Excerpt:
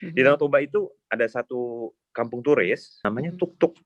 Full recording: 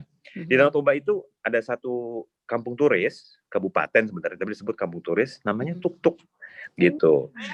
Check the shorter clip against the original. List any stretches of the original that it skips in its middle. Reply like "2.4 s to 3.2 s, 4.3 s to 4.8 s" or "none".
3.3 s to 5.4 s